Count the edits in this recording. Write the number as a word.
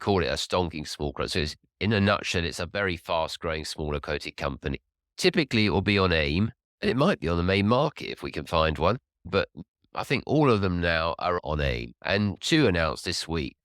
one